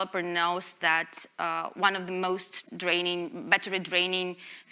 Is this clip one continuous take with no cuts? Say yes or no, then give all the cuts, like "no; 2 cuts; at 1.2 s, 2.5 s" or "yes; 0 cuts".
yes; 0 cuts